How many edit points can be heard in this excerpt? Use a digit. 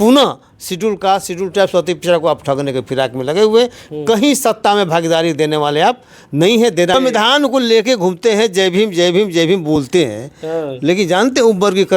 1